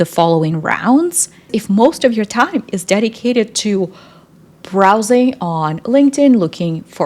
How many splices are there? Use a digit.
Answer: 1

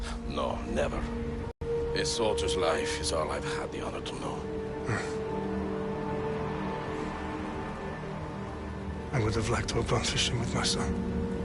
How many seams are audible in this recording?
1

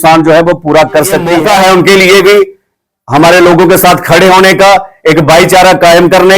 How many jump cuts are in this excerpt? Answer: 1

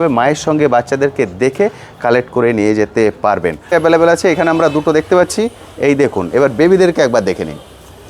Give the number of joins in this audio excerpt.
1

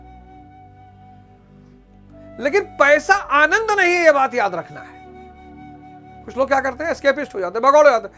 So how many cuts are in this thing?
2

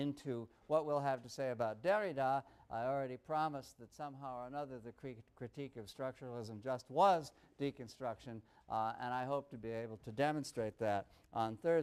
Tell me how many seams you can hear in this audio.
0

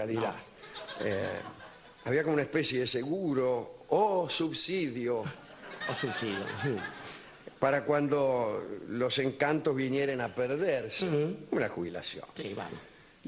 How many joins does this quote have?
0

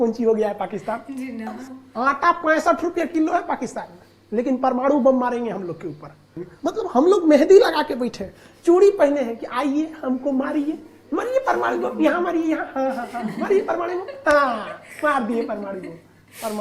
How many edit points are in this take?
2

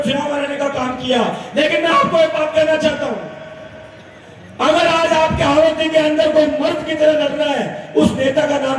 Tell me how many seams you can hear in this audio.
0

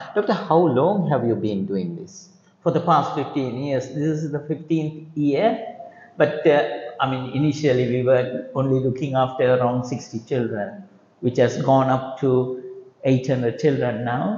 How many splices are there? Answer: 0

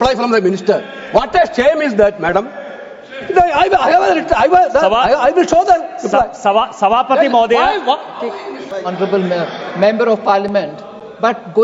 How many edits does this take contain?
1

